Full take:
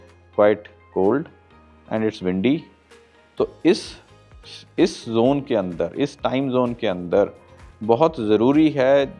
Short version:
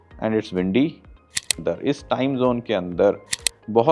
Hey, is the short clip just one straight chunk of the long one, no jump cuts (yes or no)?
no